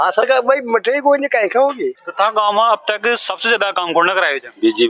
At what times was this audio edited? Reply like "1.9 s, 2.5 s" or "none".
2.0 s